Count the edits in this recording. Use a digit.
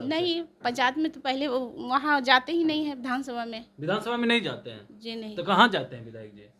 0